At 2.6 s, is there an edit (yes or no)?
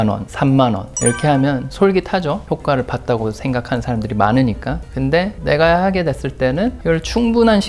no